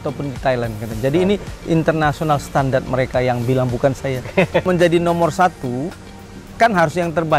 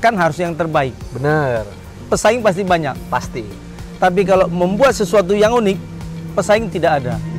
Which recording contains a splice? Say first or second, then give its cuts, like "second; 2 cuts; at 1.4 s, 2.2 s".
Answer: first; 1 cut; at 4.6 s